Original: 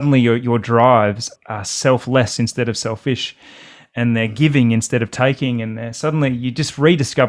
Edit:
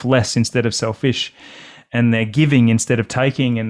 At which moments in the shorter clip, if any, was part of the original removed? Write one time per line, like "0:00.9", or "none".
none